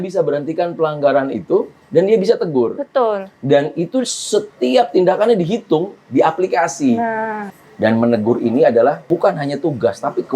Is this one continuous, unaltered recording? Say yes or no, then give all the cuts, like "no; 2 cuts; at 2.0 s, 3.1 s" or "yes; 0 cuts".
no; 2 cuts; at 7.4 s, 9.0 s